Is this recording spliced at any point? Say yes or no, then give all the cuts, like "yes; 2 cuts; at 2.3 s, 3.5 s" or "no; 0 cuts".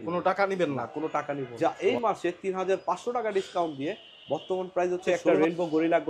yes; 2 cuts; at 1.5 s, 5.0 s